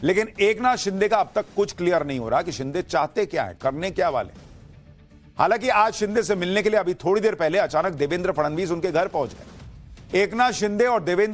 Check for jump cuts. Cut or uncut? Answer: uncut